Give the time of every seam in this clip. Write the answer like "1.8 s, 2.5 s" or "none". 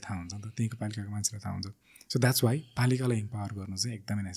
none